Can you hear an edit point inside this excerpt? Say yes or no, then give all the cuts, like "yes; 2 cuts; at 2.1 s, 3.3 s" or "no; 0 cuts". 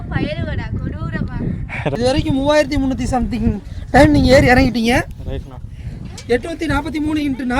yes; 1 cut; at 1.9 s